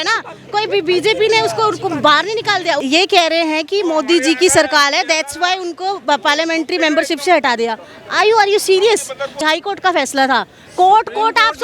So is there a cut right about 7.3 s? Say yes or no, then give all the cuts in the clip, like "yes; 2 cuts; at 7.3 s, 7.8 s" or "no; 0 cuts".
no; 2 cuts; at 2.8 s, 9.4 s